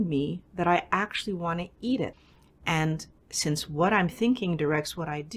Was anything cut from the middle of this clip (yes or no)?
no